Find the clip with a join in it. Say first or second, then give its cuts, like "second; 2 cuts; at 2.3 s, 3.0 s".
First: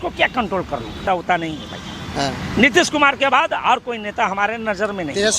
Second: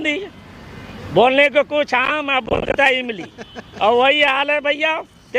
first; 1 cut; at 1.0 s